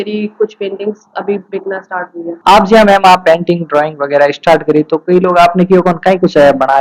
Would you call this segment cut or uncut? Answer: uncut